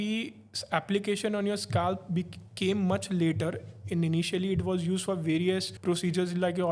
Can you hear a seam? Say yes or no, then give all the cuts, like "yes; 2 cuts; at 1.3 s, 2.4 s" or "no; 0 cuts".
yes; 1 cut; at 5.7 s